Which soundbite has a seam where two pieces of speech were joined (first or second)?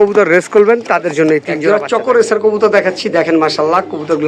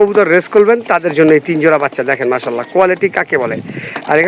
first